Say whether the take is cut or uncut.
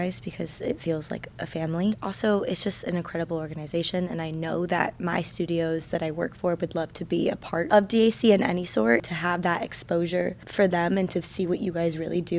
cut